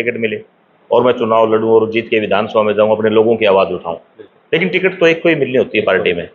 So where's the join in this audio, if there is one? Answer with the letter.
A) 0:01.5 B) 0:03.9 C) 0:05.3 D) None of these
D